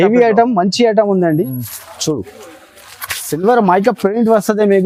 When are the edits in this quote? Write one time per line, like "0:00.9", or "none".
none